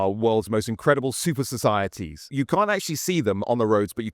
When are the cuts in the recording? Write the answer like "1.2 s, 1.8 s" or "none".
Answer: 2.3 s